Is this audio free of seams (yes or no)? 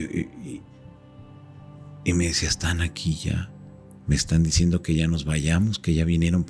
yes